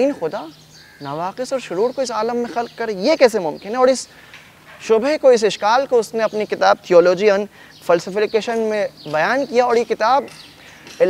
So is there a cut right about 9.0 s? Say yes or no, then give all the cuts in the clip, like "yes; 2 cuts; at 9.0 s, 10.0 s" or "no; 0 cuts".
no; 0 cuts